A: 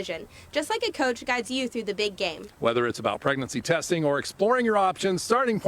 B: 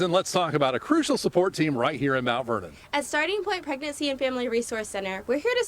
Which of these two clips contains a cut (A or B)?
B